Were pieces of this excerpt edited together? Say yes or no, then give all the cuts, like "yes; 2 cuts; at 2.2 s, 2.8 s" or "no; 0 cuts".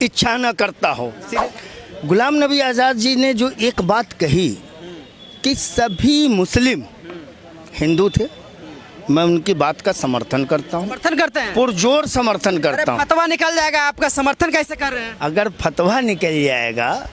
yes; 1 cut; at 1.2 s